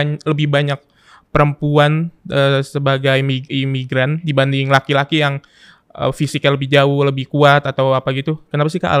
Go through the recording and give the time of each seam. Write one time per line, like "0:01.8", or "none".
none

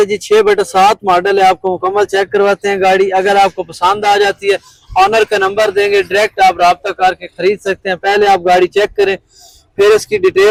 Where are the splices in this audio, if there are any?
none

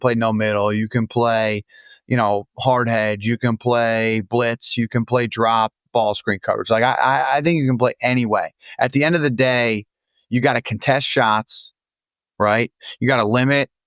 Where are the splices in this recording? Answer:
none

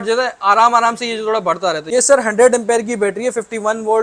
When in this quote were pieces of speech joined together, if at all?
0:02.0

